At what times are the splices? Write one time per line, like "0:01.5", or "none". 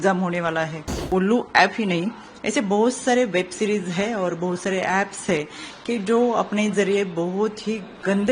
0:01.1